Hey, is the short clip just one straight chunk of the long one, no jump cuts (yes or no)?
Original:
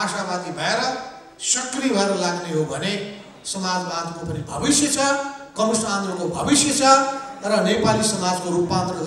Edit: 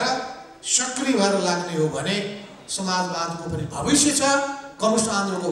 yes